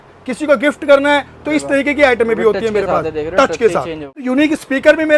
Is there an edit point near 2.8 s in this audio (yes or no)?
no